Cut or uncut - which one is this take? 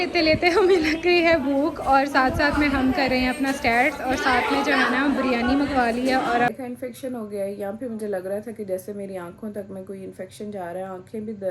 cut